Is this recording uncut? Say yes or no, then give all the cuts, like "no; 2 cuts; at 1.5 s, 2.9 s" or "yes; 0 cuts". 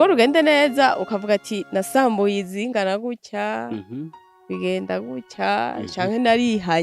yes; 0 cuts